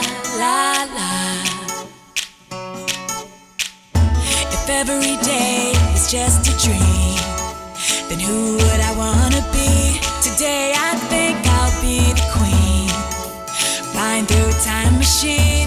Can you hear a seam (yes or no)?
no